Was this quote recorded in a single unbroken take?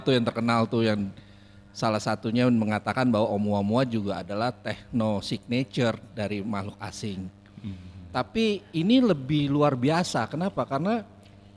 yes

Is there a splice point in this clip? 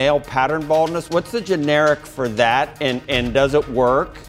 yes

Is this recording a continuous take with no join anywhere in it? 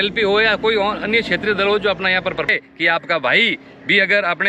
no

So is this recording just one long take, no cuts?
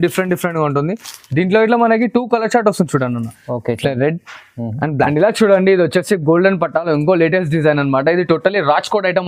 no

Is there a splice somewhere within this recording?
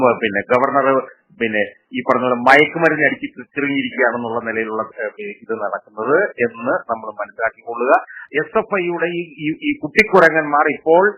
yes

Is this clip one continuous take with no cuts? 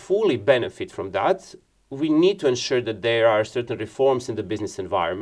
yes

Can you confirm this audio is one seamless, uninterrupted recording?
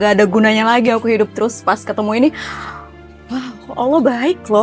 yes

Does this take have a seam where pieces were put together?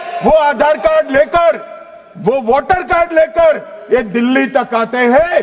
no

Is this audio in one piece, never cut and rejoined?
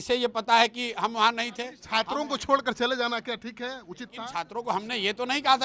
no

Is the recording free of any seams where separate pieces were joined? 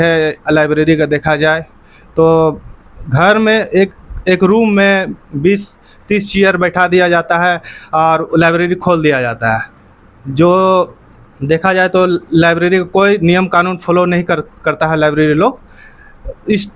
yes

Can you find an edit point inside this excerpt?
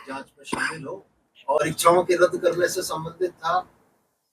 yes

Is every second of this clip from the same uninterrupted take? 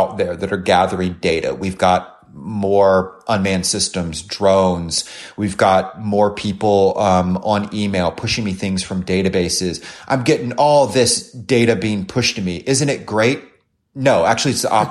yes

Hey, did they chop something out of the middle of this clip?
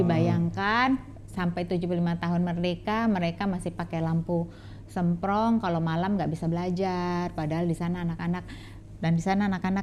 no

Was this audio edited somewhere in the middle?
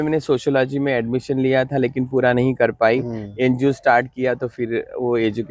no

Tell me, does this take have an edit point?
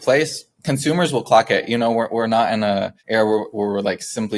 yes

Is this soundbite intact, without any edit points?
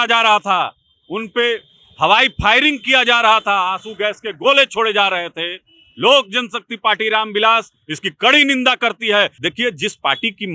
no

